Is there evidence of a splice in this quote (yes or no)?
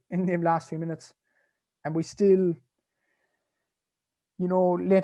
no